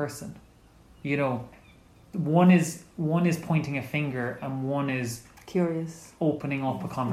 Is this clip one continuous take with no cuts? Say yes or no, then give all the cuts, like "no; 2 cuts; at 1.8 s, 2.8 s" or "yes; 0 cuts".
yes; 0 cuts